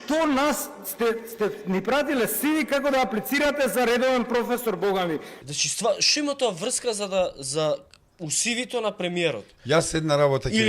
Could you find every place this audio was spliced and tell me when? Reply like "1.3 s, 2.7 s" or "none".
5.4 s